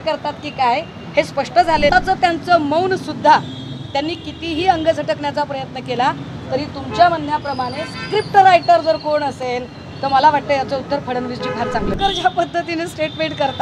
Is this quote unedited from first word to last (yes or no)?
no